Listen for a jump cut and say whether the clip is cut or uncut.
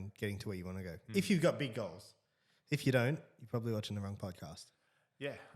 uncut